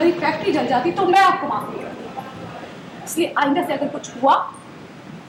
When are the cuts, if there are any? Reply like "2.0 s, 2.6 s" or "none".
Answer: none